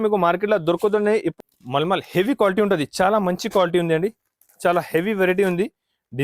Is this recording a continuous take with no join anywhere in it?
no; 1 cut; at 1.4 s

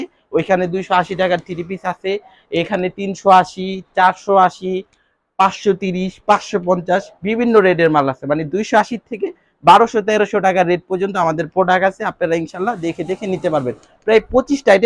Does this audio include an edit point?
no; 0 cuts

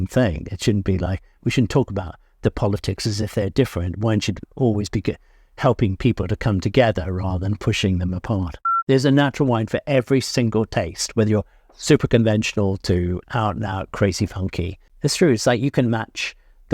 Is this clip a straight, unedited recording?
no; 2 cuts; at 8.7 s, 14.8 s

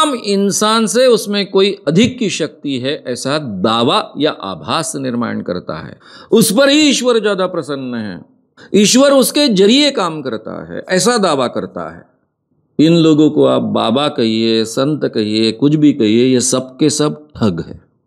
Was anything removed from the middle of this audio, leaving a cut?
no; 0 cuts

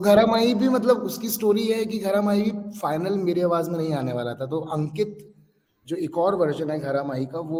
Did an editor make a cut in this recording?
no; 0 cuts

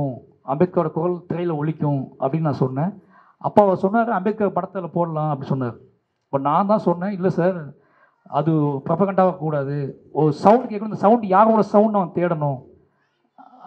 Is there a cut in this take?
no; 0 cuts

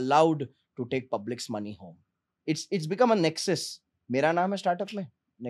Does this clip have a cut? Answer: yes; 1 cut; at 2.3 s

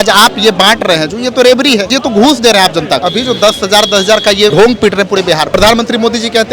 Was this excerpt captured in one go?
no; 4 cuts; at 1.9 s, 3.0 s, 4.5 s, 5.5 s

